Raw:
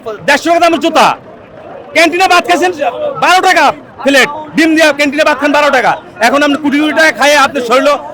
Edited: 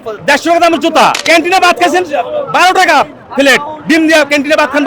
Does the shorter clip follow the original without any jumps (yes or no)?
no